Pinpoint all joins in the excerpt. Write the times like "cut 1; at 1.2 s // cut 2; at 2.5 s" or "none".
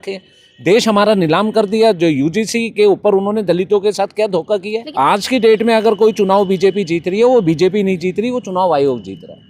cut 1; at 4.9 s